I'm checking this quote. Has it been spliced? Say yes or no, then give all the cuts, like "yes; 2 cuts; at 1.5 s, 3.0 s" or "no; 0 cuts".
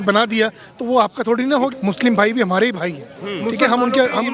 yes; 1 cut; at 1.7 s